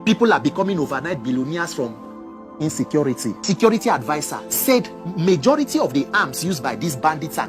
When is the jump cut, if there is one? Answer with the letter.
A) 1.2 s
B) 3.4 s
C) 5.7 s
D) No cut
B